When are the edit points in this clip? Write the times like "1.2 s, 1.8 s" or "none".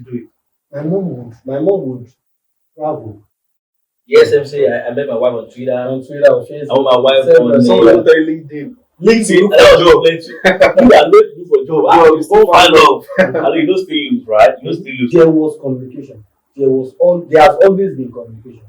3.4 s, 15.1 s